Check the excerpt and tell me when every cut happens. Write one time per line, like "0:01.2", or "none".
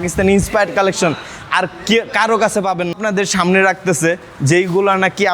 0:02.9

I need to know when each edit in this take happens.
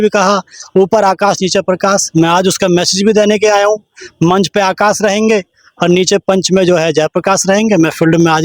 none

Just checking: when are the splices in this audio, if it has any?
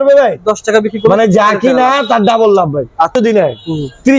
0:03.2

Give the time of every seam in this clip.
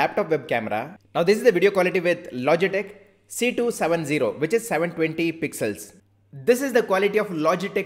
0:01.0
0:06.0

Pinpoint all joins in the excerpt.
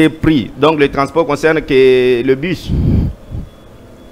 none

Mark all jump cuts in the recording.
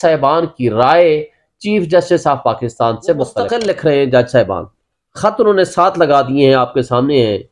0:03.5

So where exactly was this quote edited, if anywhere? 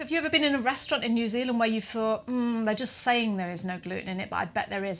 none

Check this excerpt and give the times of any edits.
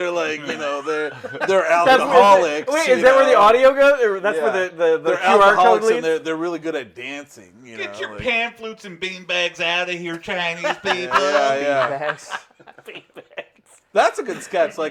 none

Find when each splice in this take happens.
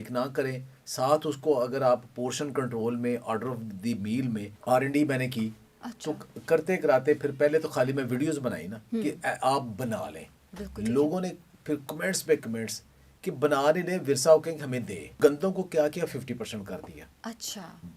0:04.5
0:15.1

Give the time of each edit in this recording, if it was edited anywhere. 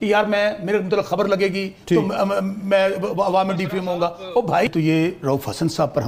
0:04.7

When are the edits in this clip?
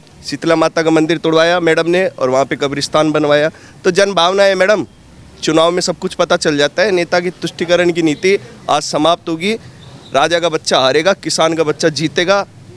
none

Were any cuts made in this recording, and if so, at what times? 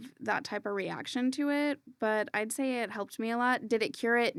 none

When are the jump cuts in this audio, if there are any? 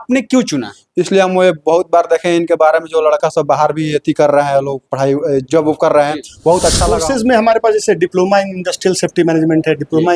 0:07.0

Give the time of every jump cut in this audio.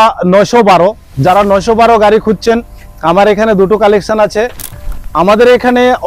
0:04.8

